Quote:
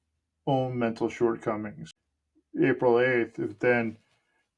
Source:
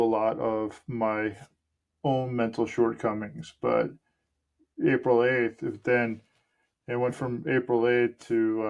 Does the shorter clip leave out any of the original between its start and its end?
yes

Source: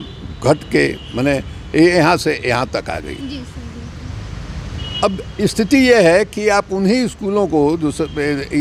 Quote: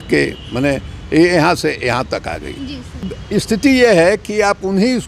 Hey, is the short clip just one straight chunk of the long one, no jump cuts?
no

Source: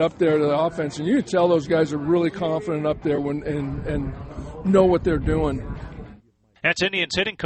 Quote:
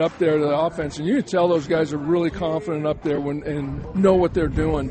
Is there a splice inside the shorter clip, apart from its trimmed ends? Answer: yes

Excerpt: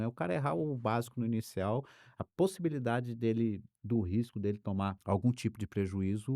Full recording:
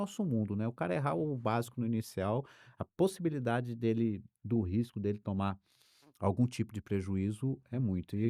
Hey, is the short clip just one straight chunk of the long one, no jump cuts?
no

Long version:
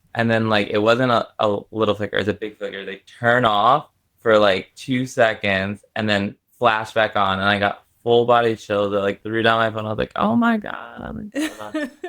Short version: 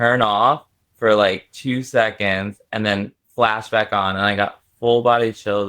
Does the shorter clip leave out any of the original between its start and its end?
no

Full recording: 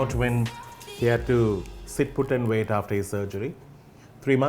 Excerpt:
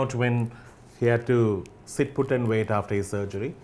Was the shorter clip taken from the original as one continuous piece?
yes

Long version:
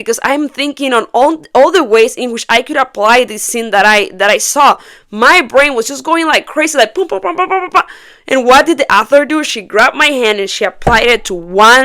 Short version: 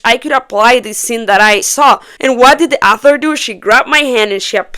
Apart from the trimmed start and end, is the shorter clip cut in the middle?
yes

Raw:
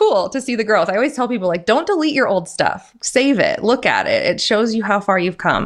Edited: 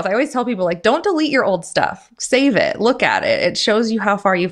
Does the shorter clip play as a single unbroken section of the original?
yes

